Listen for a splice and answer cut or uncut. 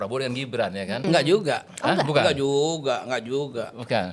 cut